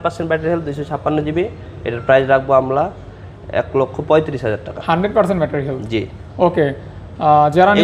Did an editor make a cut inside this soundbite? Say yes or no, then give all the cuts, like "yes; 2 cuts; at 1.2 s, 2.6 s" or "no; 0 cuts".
no; 0 cuts